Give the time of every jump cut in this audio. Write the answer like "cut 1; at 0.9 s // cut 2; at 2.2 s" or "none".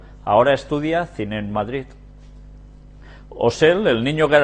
cut 1; at 2.2 s

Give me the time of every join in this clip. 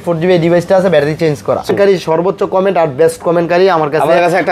cut 1; at 1.7 s

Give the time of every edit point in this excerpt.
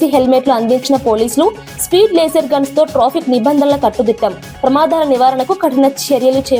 none

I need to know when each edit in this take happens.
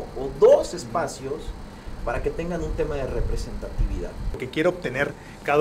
cut 1; at 4.4 s

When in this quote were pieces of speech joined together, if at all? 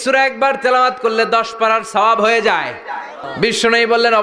cut 1; at 3.2 s

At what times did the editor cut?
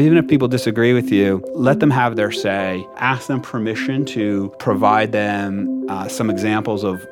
cut 1; at 1.5 s // cut 2; at 2.9 s // cut 3; at 4.5 s

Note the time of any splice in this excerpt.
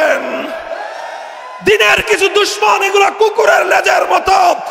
none

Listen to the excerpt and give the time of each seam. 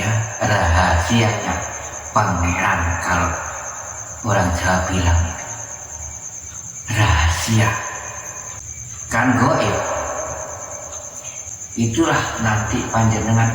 none

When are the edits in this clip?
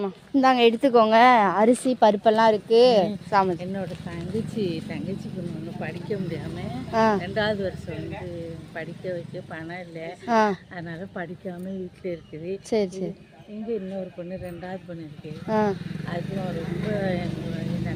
none

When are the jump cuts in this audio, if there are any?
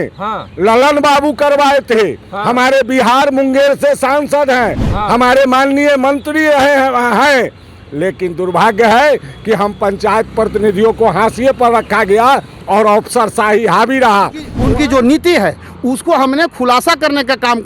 cut 1; at 14.5 s

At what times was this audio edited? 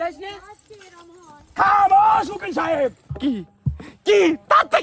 cut 1; at 3.1 s

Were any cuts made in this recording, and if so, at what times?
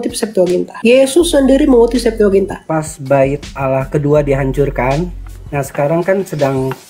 cut 1; at 2.6 s

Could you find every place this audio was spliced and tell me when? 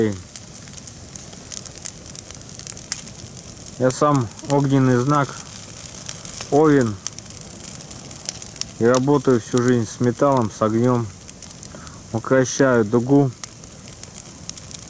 none

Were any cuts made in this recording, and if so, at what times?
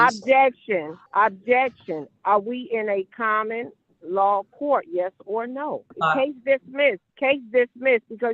cut 1; at 1.0 s // cut 2; at 5.9 s // cut 3; at 7.1 s

